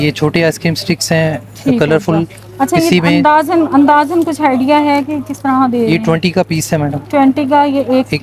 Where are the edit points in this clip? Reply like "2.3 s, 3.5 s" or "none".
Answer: none